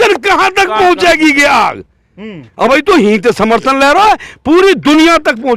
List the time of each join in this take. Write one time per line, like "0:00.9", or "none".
none